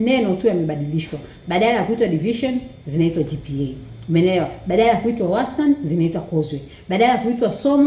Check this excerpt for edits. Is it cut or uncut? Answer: uncut